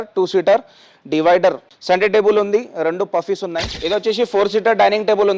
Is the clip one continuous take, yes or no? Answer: no